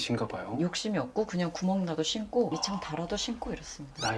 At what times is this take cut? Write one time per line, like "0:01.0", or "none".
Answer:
none